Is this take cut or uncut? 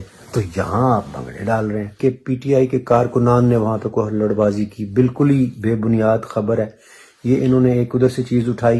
cut